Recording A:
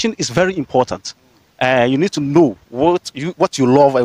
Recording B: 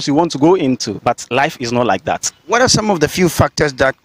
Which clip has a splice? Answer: B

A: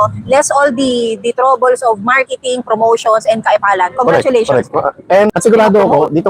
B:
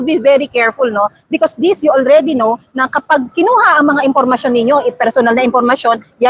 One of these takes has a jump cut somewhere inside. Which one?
A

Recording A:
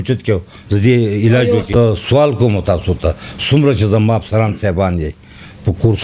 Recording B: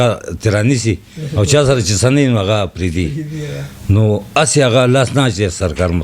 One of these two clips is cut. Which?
A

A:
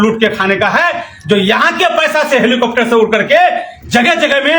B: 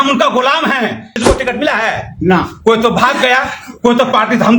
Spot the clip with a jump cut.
B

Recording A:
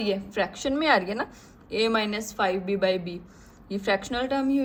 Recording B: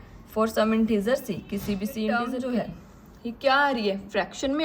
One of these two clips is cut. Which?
B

